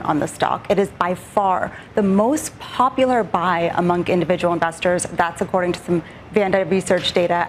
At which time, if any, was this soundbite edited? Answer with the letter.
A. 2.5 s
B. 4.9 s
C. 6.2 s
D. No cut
D